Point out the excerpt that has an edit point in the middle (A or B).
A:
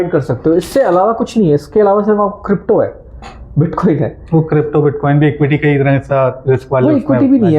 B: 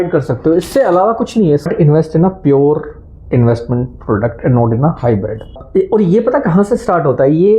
B